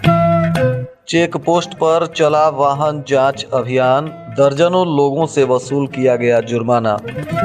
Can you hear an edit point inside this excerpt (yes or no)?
yes